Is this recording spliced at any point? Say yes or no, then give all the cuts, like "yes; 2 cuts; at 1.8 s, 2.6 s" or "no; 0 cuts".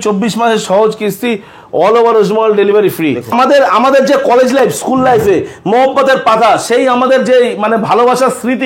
yes; 1 cut; at 3.3 s